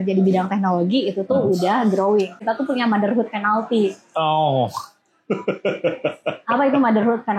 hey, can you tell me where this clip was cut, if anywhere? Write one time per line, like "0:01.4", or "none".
0:02.4